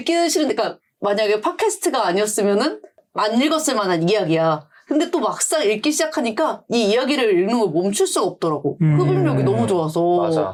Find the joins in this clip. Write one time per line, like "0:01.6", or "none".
none